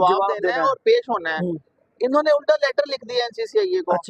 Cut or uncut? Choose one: uncut